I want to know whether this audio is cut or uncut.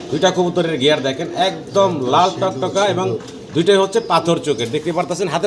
uncut